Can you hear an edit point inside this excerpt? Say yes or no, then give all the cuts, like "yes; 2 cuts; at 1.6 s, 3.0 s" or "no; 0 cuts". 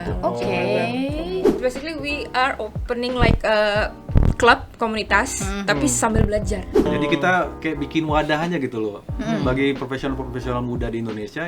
yes; 2 cuts; at 1.5 s, 6.9 s